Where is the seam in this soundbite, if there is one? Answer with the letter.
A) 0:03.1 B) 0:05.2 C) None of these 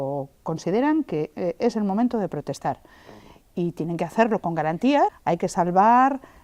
B